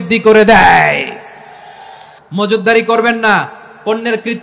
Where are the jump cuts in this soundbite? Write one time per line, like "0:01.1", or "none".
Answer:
0:02.1

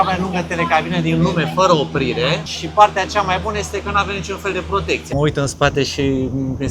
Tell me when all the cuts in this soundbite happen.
0:02.5
0:05.1

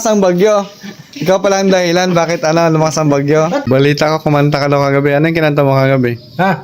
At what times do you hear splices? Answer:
0:03.6

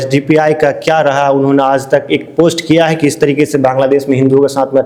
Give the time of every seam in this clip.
none

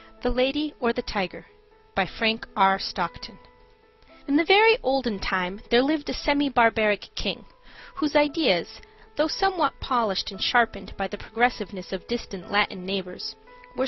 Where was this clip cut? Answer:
0:06.1

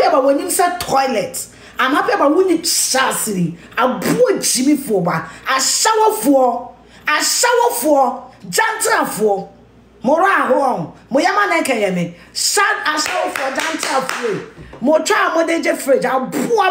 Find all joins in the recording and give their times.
none

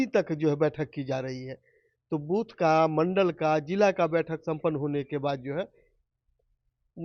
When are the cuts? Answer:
none

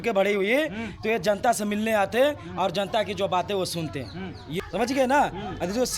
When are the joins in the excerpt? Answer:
0:04.4

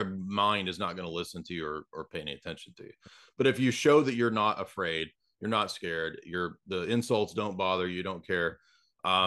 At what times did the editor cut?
none

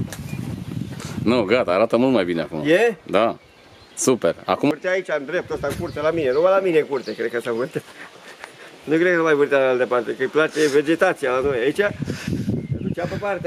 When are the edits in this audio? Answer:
0:04.7

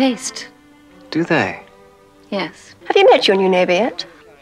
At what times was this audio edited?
0:02.7

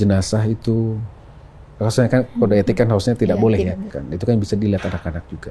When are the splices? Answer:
0:04.0

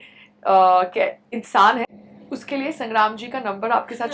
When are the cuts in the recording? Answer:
0:01.9

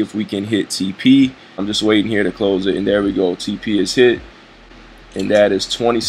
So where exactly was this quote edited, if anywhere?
0:01.7

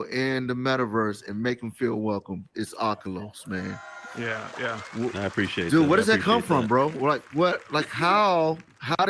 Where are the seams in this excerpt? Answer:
none

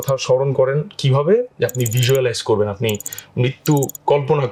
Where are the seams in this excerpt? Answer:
none

